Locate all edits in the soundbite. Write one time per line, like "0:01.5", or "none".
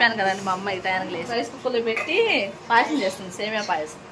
0:01.3